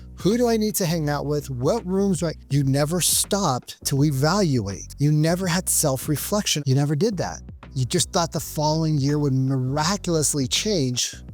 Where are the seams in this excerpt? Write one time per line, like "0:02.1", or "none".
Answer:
0:02.4
0:04.8
0:06.5